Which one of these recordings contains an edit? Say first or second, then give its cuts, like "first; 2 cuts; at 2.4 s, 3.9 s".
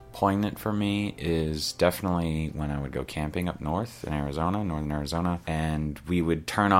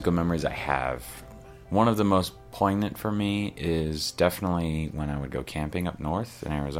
first; 1 cut; at 5.4 s